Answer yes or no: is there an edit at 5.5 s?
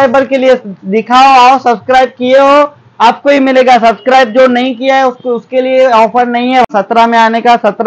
no